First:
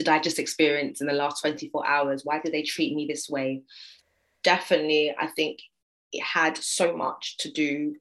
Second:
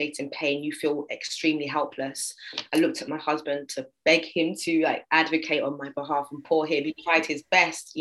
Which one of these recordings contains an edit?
first; 1 cut; at 4.1 s

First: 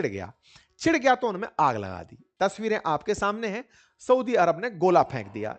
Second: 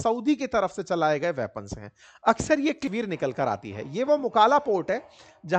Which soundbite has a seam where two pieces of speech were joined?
second; 1 cut; at 2.8 s

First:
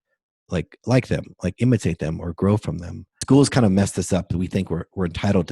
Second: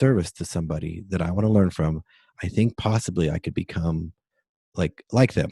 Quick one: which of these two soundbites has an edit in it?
first; 1 cut; at 3.2 s

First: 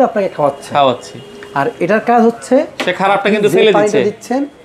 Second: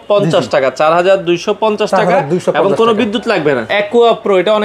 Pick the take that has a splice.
second; 1 cut; at 3.7 s

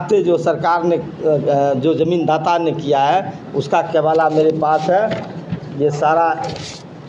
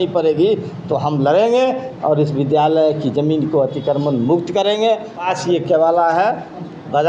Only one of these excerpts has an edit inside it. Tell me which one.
second; 1 cut; at 5.2 s

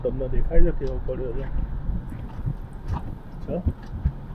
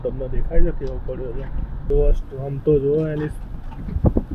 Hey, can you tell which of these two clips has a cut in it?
second; 1 cut; at 1.9 s

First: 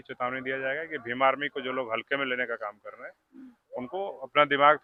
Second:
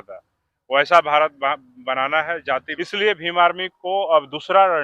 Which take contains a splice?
second; 1 cut; at 2.7 s

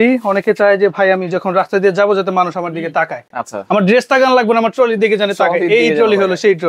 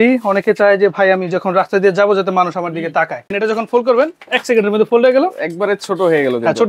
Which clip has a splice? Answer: second; 1 cut; at 3.3 s

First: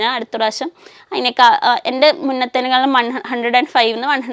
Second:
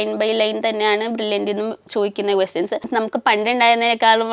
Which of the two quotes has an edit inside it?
second; 1 cut; at 2.9 s

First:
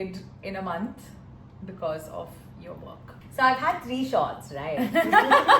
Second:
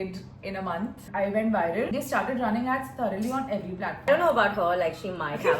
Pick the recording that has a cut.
second; 3 cuts; at 1.0 s, 1.9 s, 4.1 s

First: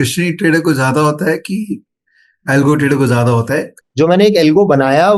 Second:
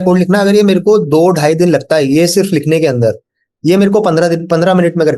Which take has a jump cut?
first; 1 cut; at 3.8 s

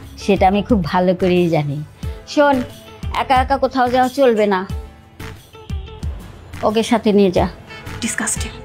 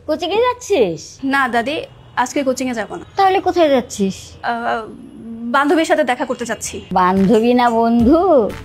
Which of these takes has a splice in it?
second; 4 cuts; at 1.1 s, 3.0 s, 4.3 s, 6.7 s

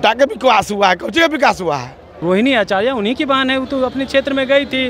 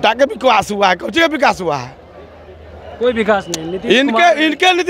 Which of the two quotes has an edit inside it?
first; 1 cut; at 2.2 s

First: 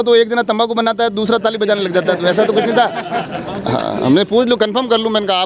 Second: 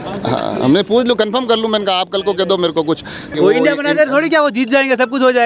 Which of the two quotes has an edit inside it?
second; 1 cut; at 3.3 s

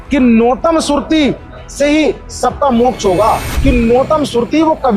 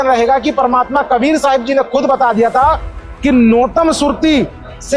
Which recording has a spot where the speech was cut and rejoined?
first; 1 cut; at 3.5 s

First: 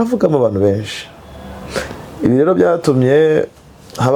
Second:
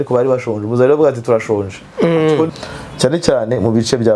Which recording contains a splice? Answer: second; 1 cut; at 2.5 s

